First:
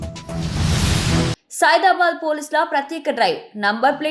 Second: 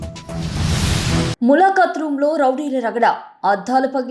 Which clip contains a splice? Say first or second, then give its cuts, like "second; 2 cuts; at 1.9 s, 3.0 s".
first; 1 cut; at 1.3 s